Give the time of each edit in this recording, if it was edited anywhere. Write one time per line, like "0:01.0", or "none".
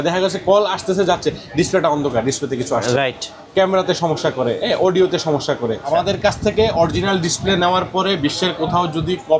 0:05.8